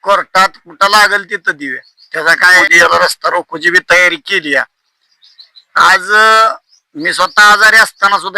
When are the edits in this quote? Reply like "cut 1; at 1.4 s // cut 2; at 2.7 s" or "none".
cut 1; at 2.6 s